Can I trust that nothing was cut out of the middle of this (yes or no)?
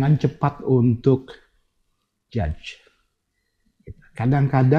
no